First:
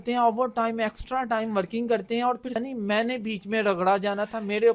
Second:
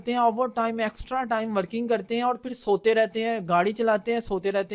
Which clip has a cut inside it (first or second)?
first